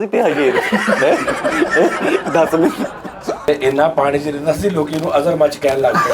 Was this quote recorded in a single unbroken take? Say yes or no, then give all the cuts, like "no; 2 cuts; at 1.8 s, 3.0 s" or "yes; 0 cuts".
no; 1 cut; at 3.4 s